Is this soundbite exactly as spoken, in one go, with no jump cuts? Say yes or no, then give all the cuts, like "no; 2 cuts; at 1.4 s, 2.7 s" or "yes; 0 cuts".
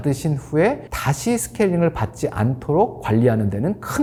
yes; 0 cuts